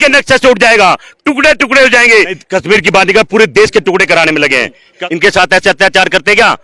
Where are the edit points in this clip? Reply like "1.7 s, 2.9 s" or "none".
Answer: 2.4 s, 4.9 s